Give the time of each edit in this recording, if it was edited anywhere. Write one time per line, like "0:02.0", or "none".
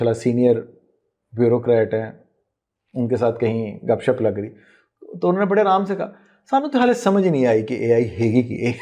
none

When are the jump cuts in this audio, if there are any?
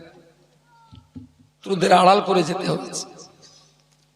0:01.6

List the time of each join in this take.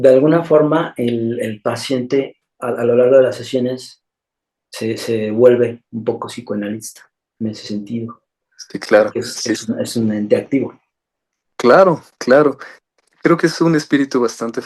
0:02.4

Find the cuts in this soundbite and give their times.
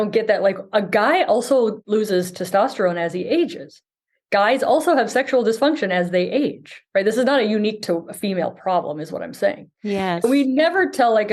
0:01.8

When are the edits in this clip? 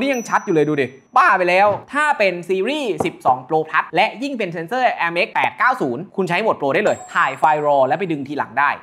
0:01.8

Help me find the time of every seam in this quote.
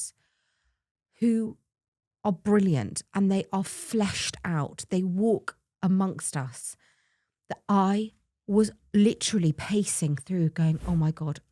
none

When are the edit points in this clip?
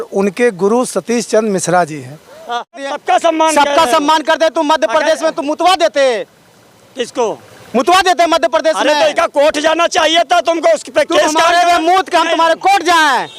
0:02.8

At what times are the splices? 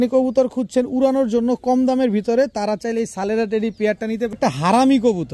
0:04.4

